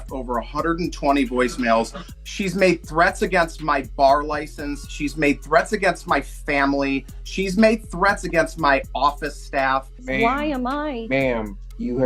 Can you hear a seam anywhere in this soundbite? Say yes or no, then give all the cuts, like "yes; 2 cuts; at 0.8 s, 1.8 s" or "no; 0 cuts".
yes; 2 cuts; at 2.0 s, 10.0 s